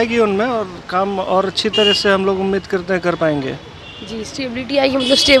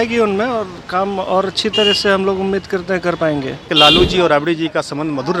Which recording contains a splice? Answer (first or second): second